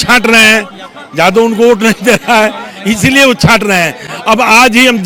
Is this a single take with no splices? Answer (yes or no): yes